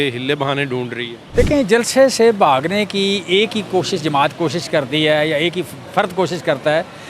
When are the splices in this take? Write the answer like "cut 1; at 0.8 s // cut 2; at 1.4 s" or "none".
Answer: cut 1; at 1.1 s